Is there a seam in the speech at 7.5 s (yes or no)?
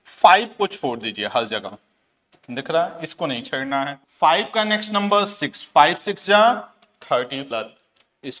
yes